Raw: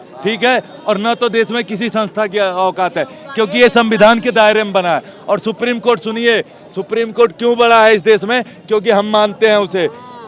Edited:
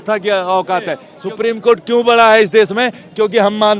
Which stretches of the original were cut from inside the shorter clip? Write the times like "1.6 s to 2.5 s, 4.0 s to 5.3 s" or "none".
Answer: 3.2 s to 6.6 s

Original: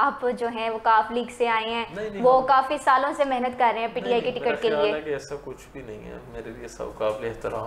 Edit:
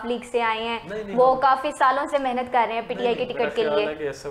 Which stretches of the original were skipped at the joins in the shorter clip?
none

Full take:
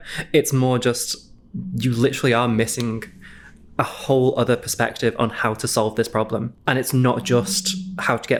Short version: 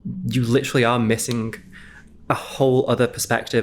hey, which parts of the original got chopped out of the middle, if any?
none

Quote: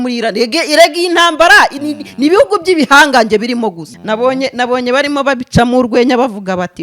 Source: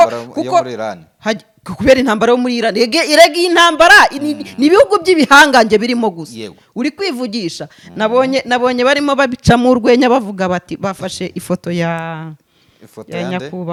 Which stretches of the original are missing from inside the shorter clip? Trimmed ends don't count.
6.3 s to 7.8 s

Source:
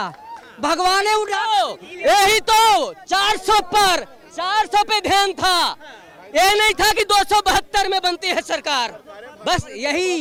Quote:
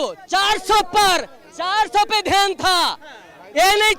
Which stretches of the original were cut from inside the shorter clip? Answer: none

